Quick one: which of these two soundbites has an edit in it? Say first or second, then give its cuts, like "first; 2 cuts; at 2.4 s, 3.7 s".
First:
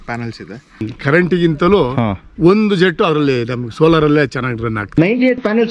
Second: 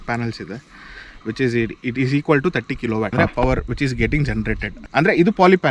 first; 2 cuts; at 1.0 s, 4.8 s